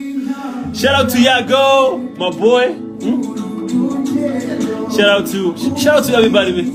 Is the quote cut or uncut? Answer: uncut